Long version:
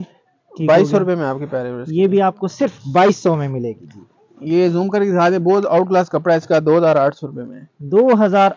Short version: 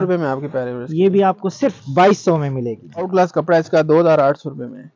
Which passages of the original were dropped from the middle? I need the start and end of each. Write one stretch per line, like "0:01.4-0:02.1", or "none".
0:04.1-0:05.8